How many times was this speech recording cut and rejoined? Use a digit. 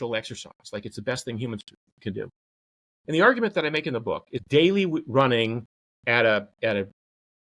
1